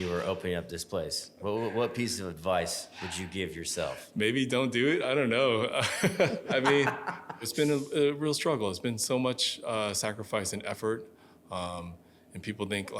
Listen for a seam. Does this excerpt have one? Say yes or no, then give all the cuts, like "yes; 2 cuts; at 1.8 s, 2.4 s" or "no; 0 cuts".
yes; 2 cuts; at 6.4 s, 7.5 s